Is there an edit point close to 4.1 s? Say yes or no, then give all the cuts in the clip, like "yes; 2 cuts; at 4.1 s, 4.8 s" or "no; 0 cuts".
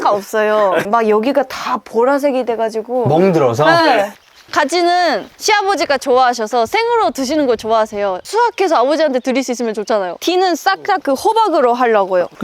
yes; 3 cuts; at 4.1 s, 5.3 s, 10.2 s